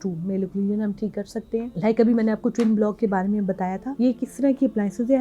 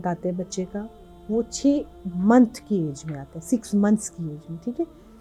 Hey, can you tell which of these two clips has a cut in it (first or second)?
first